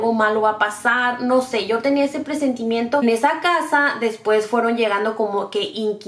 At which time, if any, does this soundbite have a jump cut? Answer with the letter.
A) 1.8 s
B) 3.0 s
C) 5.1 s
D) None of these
B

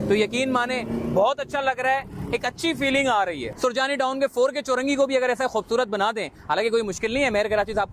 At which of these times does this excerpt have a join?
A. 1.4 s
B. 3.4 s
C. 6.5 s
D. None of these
B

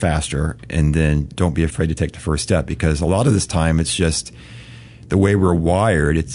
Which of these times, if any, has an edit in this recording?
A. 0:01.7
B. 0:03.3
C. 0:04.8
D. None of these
A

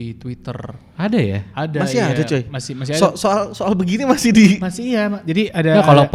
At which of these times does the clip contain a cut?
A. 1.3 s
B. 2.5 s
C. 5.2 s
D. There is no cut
D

